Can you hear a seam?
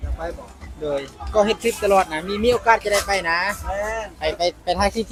no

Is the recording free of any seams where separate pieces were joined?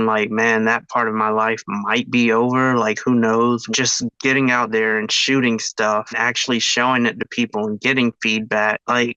yes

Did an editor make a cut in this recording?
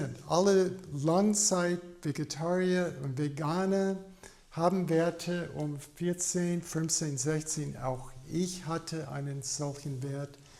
no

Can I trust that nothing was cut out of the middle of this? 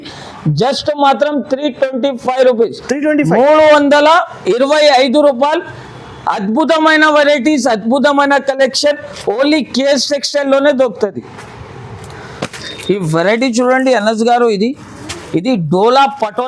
yes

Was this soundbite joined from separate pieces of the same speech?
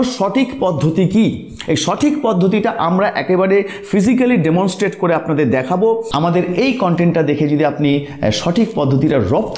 yes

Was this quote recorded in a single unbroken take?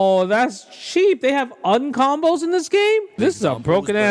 no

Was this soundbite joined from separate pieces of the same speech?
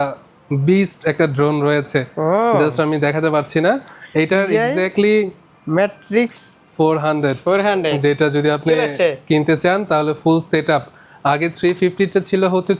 no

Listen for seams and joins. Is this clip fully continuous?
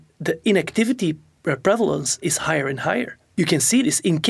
no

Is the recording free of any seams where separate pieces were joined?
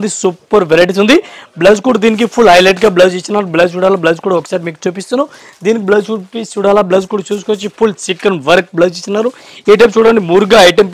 yes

